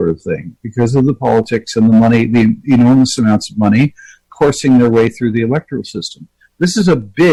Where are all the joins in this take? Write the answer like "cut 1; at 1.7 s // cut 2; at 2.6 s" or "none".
none